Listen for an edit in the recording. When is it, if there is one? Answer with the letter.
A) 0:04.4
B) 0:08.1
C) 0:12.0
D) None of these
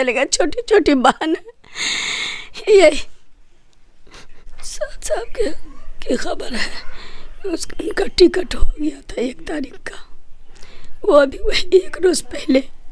A